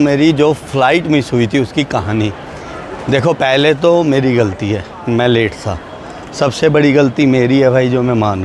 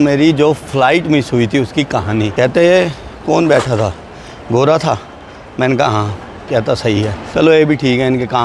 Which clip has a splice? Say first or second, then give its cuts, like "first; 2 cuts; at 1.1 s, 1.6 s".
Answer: second; 2 cuts; at 2.3 s, 7.2 s